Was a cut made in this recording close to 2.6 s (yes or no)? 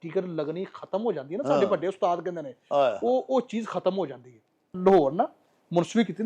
no